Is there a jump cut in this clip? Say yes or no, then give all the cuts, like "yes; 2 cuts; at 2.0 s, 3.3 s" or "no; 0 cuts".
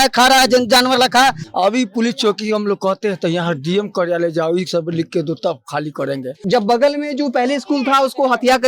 yes; 2 cuts; at 1.4 s, 6.4 s